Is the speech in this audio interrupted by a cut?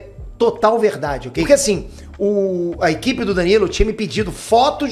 yes; 1 cut; at 1.4 s

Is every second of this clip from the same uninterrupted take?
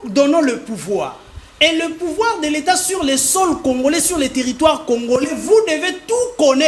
yes; 0 cuts

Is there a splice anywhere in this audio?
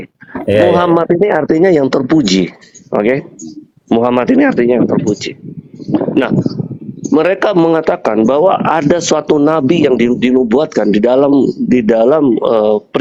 no; 0 cuts

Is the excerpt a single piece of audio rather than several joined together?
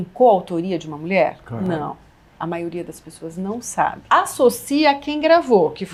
yes; 0 cuts

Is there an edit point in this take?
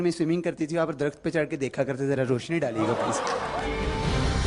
yes; 1 cut; at 3.5 s

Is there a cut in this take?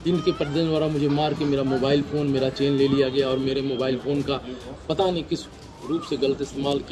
no; 0 cuts

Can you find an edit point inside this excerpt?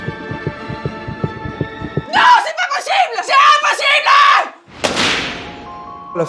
no; 0 cuts

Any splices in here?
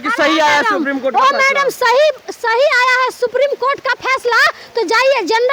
no; 0 cuts

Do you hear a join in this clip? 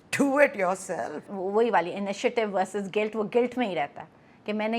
yes; 1 cut; at 1.3 s

